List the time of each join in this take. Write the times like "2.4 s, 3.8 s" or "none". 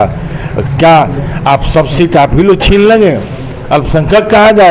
none